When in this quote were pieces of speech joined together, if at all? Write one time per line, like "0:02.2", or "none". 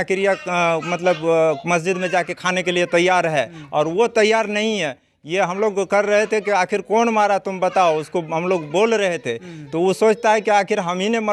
none